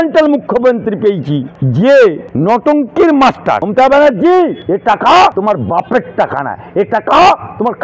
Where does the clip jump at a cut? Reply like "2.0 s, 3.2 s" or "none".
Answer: 1.6 s, 2.3 s, 3.7 s, 4.6 s, 5.3 s